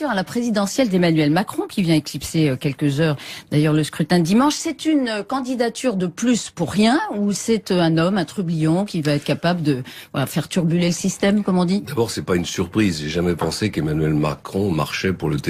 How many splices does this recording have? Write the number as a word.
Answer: one